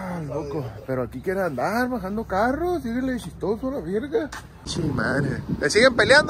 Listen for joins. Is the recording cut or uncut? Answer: cut